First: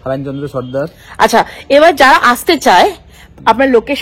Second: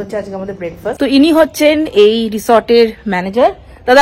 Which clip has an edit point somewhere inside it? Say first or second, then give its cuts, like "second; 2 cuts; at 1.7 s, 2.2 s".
second; 1 cut; at 1.0 s